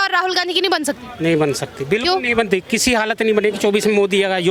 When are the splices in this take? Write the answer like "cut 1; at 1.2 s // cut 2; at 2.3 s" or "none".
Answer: none